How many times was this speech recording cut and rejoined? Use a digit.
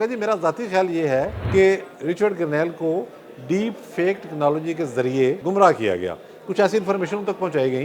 2